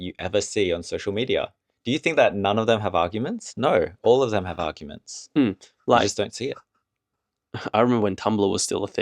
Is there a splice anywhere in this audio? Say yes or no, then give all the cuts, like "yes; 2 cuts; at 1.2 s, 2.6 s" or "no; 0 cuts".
no; 0 cuts